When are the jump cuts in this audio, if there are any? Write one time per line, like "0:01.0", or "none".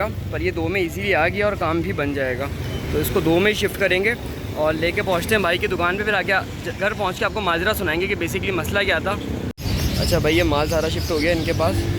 0:09.5